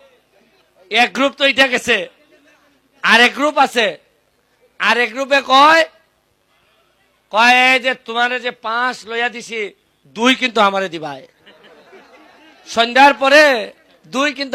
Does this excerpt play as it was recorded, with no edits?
yes; 0 cuts

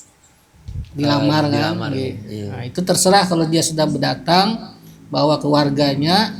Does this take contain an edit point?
no; 0 cuts

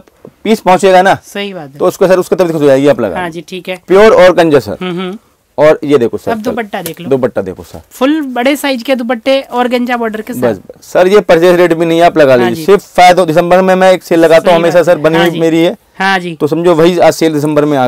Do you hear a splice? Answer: no; 0 cuts

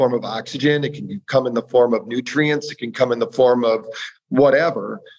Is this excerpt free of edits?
yes; 0 cuts

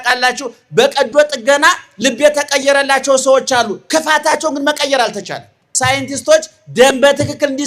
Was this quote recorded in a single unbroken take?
no; 1 cut; at 5.6 s

